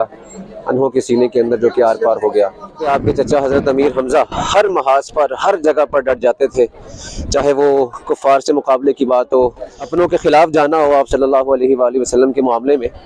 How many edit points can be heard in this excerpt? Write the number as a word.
two